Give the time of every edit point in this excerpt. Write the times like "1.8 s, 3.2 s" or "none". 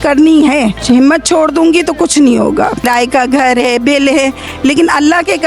2.8 s